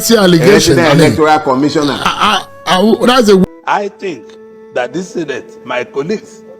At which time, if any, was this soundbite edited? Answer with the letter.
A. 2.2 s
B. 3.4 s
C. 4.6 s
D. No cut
B